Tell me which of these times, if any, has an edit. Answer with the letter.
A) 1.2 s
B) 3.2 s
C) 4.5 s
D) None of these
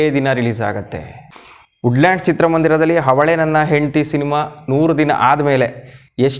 A